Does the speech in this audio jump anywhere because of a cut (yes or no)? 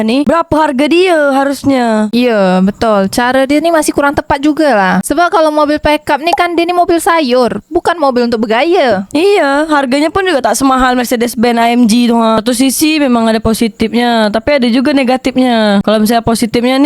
yes